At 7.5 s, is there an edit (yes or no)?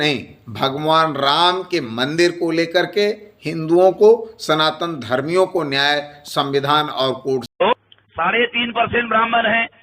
yes